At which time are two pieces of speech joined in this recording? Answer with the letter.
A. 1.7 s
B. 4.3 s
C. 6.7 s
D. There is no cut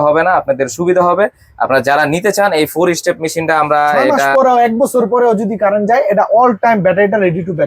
B